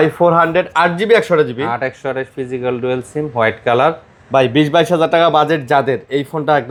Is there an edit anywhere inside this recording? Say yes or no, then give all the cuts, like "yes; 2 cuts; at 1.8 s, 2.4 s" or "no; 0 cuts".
no; 0 cuts